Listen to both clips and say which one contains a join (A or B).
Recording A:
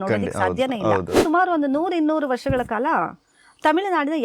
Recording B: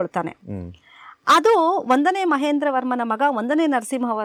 A